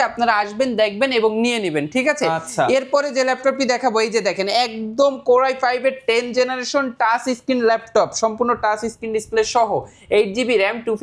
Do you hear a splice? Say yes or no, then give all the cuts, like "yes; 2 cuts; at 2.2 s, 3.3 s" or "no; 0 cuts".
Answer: no; 0 cuts